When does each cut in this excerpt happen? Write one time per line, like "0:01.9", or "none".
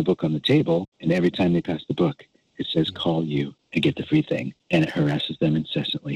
0:00.9
0:03.6
0:04.5